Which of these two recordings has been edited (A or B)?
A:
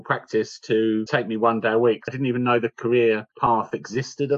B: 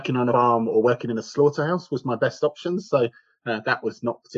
A